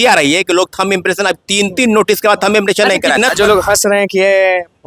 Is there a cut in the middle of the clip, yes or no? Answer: yes